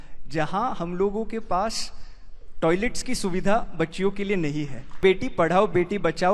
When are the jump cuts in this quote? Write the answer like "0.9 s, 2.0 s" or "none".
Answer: 4.9 s